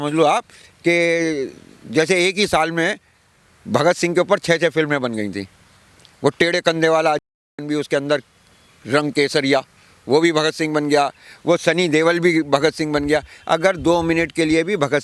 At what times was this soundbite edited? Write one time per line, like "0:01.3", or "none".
none